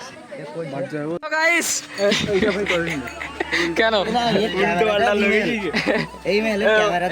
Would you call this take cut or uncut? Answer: cut